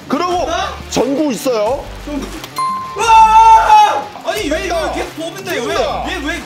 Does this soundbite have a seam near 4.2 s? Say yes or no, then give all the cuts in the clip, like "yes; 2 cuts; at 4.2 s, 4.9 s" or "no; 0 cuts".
yes; 1 cut; at 4.2 s